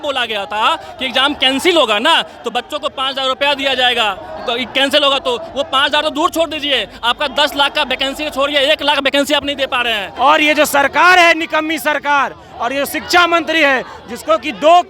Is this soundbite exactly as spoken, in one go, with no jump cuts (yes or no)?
no